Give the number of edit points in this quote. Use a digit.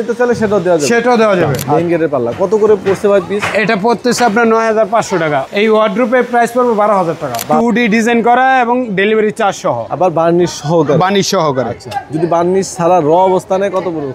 3